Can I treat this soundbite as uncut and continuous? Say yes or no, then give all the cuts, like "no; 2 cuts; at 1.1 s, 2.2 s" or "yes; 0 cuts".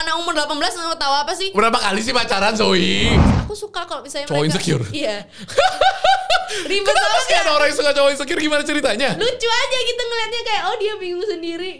no; 1 cut; at 3.2 s